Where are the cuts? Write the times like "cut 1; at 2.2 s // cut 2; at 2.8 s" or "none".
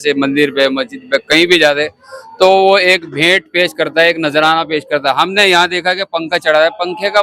none